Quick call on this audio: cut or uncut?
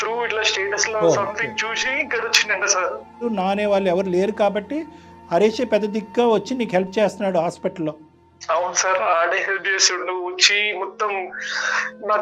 cut